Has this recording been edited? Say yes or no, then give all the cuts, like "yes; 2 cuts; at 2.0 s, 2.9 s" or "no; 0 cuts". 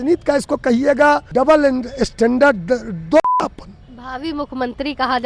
yes; 1 cut; at 1.3 s